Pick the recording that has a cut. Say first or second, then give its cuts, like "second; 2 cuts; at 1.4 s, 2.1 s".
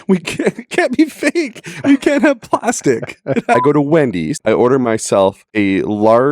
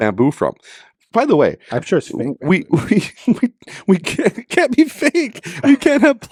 first; 3 cuts; at 3.6 s, 4.3 s, 5.4 s